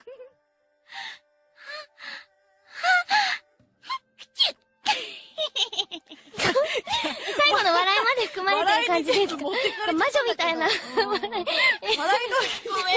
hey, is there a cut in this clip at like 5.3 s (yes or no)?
yes